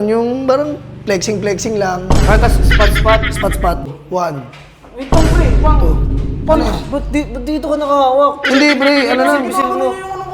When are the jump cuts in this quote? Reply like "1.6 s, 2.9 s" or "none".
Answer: 3.9 s